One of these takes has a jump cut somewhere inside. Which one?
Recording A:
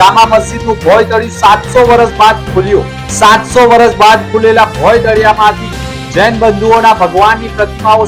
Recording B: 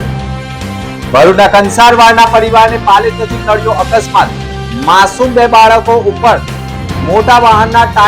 B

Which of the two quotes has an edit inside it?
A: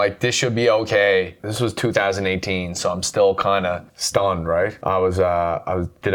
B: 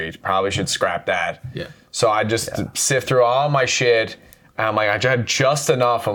A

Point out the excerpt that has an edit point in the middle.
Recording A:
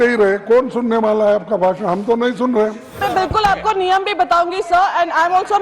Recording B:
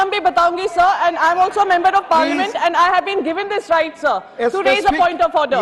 A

